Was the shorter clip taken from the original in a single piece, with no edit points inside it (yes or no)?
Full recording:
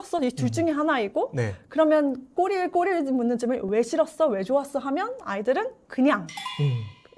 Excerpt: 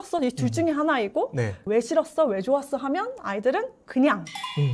no